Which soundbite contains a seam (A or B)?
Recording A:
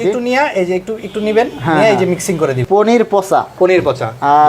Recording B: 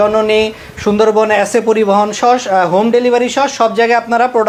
A